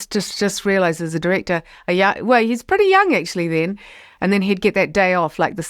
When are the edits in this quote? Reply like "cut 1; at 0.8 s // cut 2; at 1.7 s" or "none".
cut 1; at 4.0 s

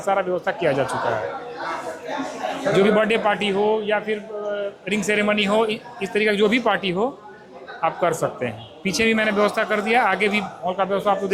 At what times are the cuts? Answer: none

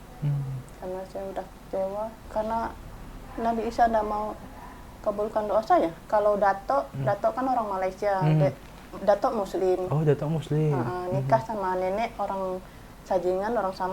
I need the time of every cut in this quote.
cut 1; at 2.2 s // cut 2; at 6.0 s

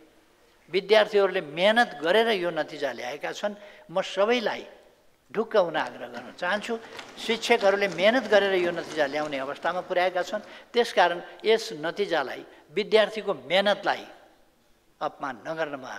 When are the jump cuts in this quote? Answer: none

